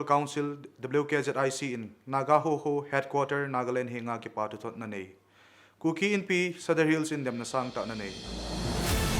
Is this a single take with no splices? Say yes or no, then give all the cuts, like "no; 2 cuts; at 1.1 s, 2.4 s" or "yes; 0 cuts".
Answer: no; 1 cut; at 8.2 s